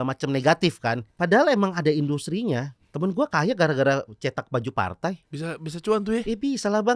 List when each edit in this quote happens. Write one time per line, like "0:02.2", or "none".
0:01.1
0:02.8
0:05.3